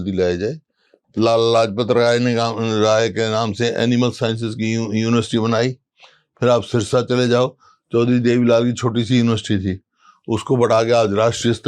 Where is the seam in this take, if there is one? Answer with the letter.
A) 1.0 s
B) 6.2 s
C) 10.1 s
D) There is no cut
A